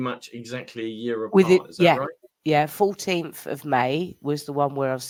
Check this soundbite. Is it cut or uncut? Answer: uncut